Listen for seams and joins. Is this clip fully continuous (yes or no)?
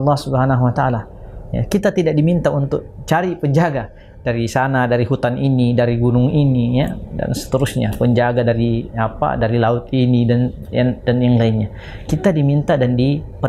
yes